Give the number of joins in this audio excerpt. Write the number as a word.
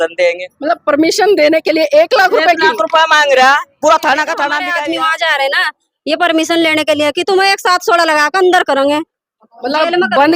one